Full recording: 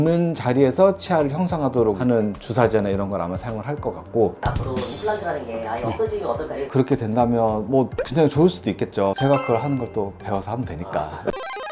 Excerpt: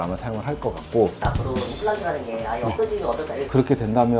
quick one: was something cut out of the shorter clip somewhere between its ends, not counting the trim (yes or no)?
no